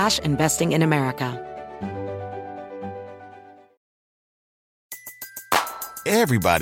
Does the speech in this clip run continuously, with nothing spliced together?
no; 1 cut; at 1.3 s

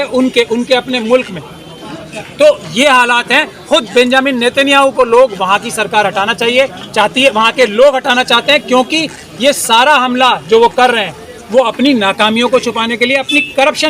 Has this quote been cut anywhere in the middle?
no; 0 cuts

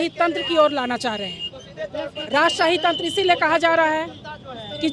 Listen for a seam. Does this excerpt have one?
no; 0 cuts

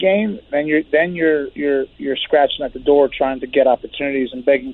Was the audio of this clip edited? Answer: no; 0 cuts

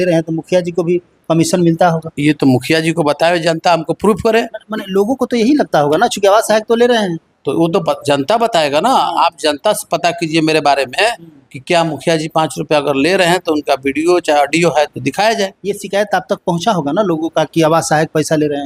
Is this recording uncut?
yes; 0 cuts

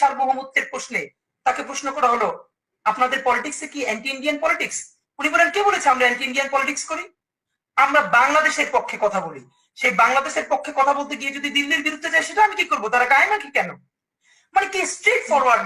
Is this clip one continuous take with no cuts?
yes; 0 cuts

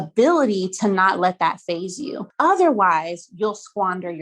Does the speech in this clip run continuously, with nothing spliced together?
no; 1 cut; at 2.2 s

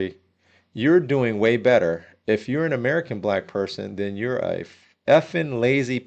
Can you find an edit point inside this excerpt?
no; 0 cuts

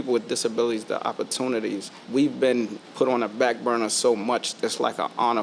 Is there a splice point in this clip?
yes; 3 cuts; at 1.9 s, 2.8 s, 4.5 s

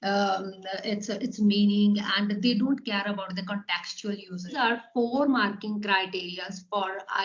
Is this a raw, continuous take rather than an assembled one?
no; 1 cut; at 4.5 s

